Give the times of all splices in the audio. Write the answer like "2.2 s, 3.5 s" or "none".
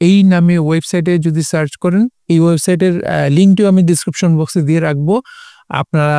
none